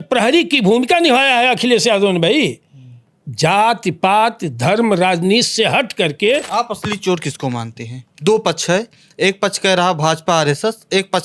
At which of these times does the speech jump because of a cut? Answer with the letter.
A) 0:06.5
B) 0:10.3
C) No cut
A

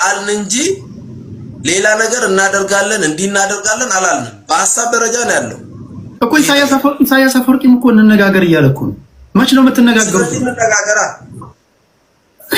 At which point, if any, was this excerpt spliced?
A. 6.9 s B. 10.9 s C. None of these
C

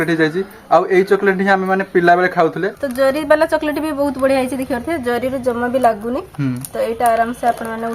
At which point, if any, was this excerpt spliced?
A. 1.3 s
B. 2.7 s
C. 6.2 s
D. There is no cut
B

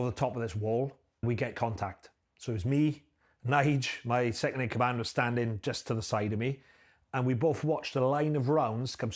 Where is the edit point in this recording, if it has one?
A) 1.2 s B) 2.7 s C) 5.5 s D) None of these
A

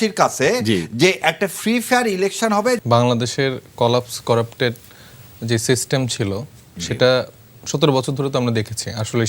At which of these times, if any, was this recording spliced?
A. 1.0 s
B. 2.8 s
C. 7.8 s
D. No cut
D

